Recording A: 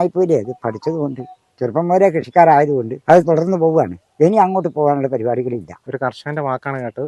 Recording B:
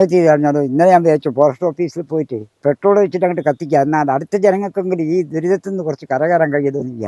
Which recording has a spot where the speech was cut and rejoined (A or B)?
A